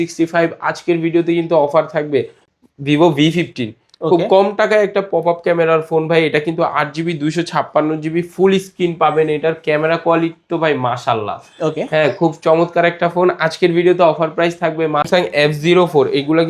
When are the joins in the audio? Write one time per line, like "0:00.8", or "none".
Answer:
0:02.4
0:15.1